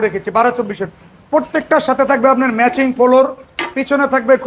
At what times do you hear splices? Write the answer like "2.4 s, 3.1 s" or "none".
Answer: none